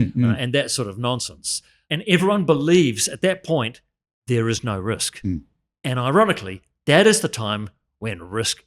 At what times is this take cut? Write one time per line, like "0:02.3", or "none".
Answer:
0:01.8

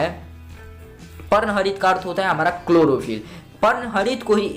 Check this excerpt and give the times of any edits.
none

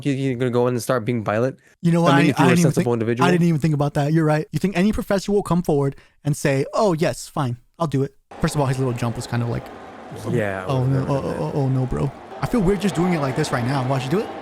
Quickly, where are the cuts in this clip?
0:04.5
0:08.2
0:12.3

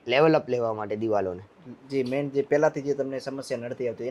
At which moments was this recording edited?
none

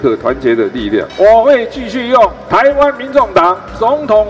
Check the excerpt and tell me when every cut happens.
0:01.1

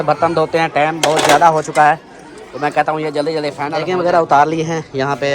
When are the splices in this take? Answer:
0:03.8

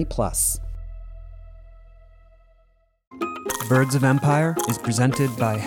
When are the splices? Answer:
0:03.1

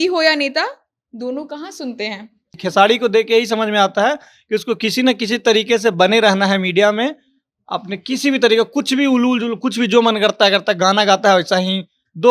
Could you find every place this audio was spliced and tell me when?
0:02.6

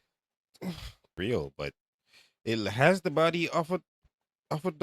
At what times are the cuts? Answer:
0:01.1

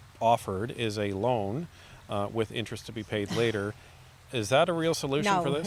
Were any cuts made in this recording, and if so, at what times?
none

